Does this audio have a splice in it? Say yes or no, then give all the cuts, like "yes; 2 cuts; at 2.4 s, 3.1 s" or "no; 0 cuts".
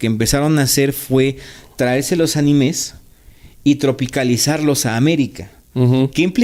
no; 0 cuts